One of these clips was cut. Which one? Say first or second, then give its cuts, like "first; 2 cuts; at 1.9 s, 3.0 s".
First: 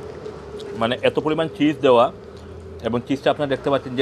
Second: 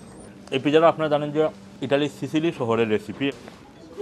second; 2 cuts; at 1.7 s, 3.3 s